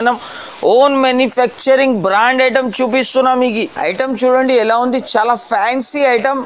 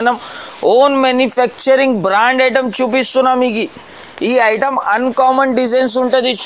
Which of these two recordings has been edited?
first; 1 cut; at 3.7 s

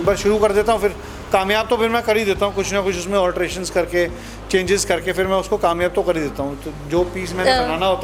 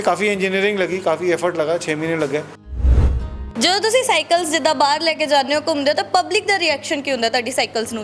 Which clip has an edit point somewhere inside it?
second; 1 cut; at 2.9 s

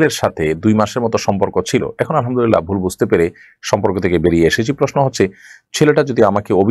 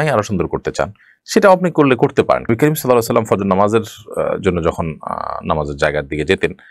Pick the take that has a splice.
second; 1 cut; at 2.5 s

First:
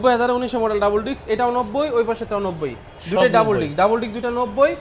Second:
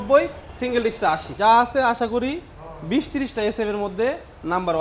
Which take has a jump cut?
second; 1 cut; at 1.3 s

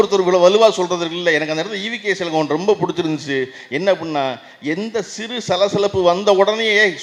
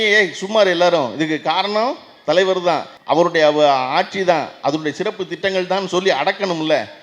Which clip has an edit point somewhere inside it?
second; 1 cut; at 2.9 s

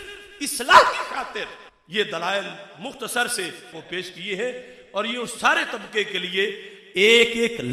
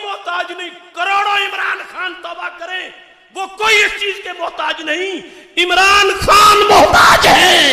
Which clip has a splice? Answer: first; 1 cut; at 3.8 s

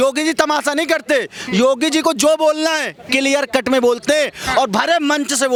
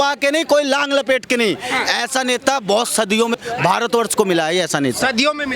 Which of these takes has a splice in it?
second; 1 cut; at 3.4 s

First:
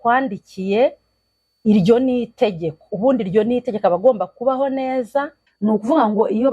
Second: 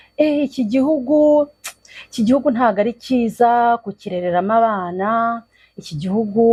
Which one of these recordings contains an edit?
first; 1 cut; at 5.5 s

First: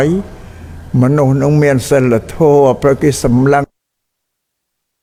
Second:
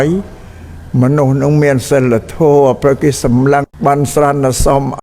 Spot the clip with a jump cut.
second; 1 cut; at 3.7 s

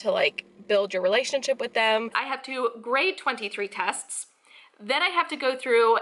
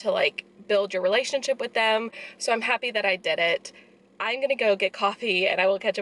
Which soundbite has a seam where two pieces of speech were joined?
first; 1 cut; at 2.2 s

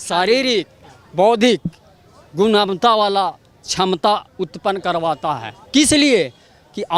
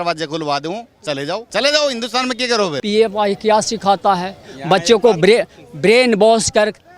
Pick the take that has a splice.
second; 2 cuts; at 1.5 s, 2.8 s

